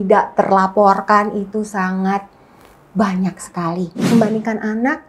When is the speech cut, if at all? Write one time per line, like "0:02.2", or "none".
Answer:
0:04.0